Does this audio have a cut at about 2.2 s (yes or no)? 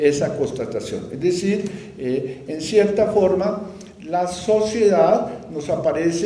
yes